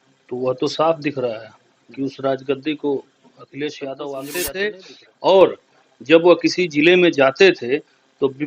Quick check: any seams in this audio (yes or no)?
yes